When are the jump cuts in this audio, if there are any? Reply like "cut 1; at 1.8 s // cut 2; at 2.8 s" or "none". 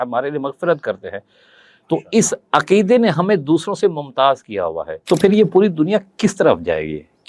cut 1; at 4.9 s